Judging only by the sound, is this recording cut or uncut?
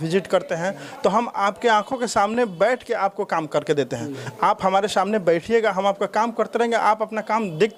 uncut